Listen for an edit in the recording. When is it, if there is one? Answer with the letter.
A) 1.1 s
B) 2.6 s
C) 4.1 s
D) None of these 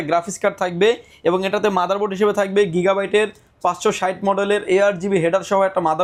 D